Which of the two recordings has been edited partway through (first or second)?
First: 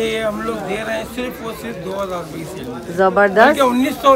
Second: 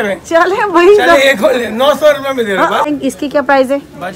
second